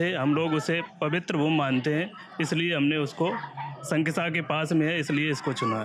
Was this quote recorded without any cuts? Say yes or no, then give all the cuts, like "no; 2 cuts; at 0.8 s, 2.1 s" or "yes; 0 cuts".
yes; 0 cuts